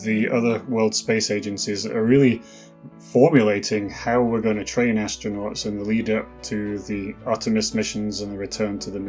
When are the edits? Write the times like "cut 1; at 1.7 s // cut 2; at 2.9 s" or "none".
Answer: none